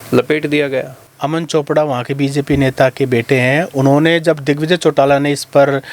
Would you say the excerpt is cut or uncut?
cut